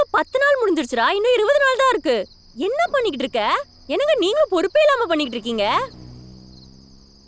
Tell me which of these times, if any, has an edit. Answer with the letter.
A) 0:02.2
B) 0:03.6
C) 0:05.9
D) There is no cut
D